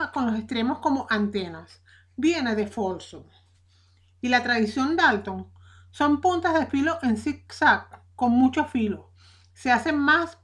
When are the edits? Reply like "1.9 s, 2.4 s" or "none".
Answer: 8.0 s